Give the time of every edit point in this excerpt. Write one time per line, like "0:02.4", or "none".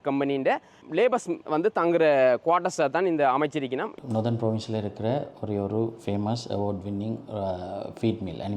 0:03.9